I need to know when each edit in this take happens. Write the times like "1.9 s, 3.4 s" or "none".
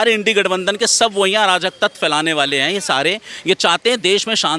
none